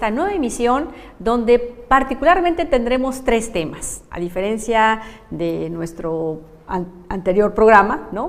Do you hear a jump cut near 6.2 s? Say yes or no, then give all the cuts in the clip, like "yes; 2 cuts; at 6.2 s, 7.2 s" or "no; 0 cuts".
no; 0 cuts